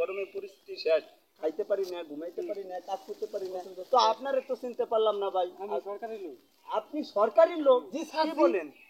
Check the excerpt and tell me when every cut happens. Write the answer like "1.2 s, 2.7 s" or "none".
none